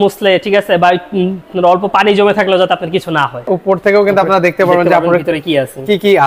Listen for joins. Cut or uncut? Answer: cut